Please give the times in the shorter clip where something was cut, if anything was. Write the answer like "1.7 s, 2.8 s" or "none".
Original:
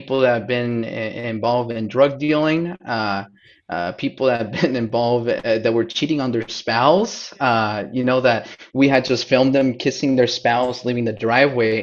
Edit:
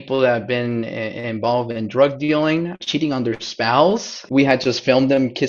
2.8 s, 4.1 s